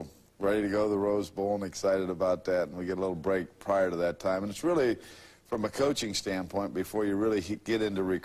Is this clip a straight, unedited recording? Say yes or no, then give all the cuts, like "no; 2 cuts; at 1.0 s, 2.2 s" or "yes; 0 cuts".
no; 1 cut; at 3.7 s